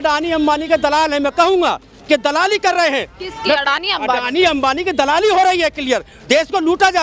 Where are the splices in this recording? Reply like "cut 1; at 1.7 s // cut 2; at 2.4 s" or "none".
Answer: none